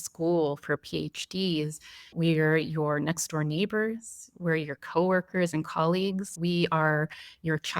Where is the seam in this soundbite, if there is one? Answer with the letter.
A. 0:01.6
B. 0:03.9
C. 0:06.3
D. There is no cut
C